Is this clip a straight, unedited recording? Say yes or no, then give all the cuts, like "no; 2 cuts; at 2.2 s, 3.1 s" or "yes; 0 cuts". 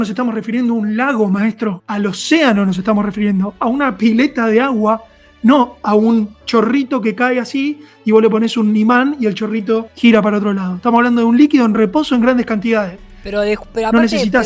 no; 2 cuts; at 1.8 s, 9.9 s